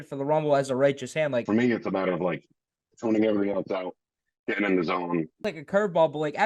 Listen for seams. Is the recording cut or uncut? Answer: cut